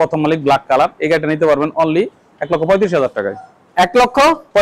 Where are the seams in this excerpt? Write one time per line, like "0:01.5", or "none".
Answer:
none